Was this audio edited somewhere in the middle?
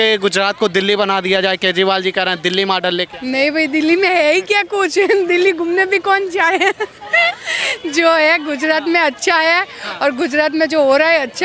no; 0 cuts

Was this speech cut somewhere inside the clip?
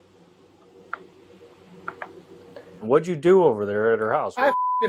yes; 1 cut; at 2.8 s

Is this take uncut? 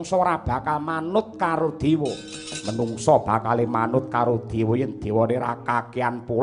yes; 0 cuts

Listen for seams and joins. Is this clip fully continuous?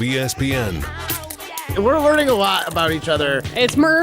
no; 1 cut; at 1.6 s

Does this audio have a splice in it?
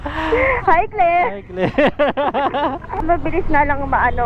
yes; 1 cut; at 3.0 s

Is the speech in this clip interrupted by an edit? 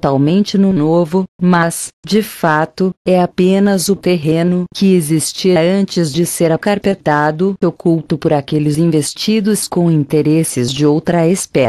no; 0 cuts

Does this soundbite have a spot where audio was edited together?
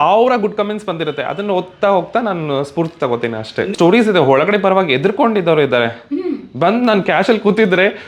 yes; 1 cut; at 3.7 s

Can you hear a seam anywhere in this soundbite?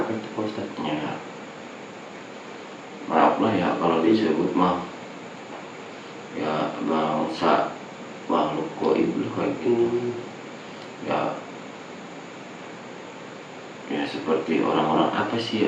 no; 0 cuts

